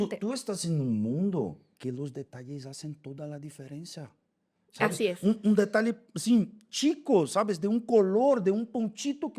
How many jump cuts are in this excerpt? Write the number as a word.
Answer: zero